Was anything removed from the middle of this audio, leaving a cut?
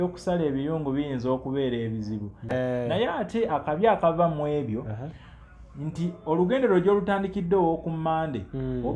yes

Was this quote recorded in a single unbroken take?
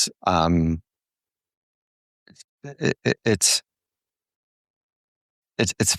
yes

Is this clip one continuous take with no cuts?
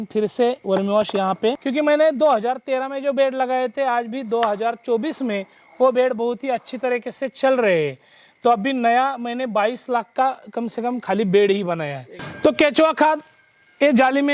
no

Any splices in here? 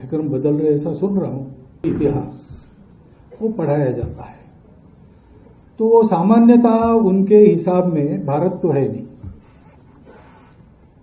yes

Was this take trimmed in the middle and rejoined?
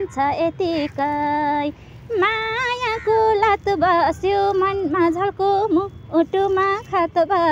no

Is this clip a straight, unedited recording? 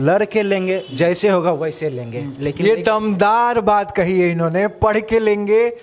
yes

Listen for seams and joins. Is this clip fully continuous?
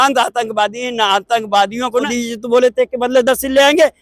no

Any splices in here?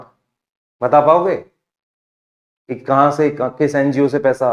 no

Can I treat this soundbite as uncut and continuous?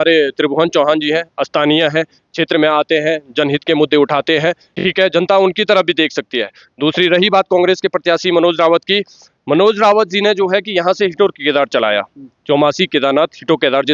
yes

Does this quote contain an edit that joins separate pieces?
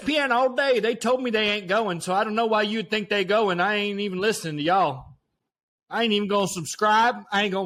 no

